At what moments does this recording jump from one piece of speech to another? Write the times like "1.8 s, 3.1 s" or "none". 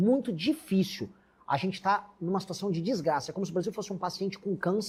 none